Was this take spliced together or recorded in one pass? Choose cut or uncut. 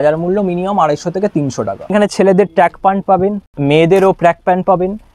cut